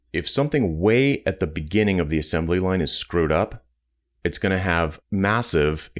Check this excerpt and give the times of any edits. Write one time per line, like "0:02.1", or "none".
0:05.0